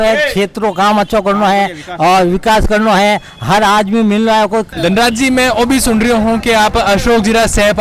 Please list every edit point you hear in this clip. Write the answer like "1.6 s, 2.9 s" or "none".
4.7 s